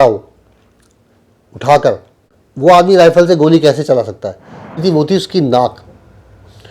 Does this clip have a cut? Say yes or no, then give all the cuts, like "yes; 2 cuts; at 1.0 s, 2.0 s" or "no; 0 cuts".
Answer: yes; 1 cut; at 4.6 s